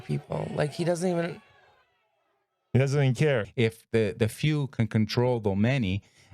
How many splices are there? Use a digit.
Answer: 1